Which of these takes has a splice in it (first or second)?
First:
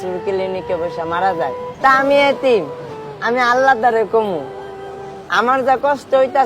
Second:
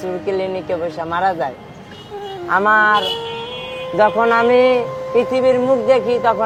first